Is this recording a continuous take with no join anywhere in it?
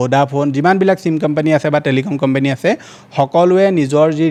yes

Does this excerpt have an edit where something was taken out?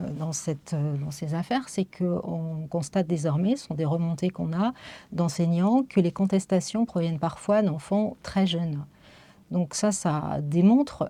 no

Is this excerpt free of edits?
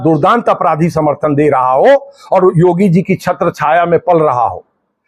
yes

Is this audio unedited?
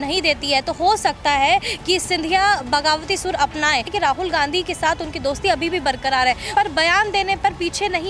no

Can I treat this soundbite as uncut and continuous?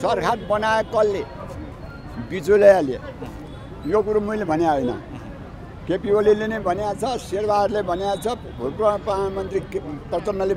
yes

